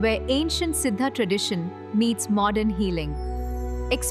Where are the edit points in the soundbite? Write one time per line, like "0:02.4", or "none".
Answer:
none